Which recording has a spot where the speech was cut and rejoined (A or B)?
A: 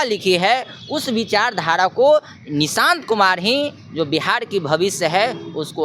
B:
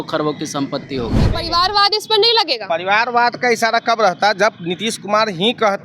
B